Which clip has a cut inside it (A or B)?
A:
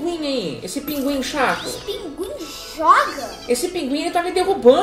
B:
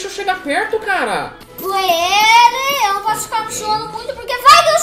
B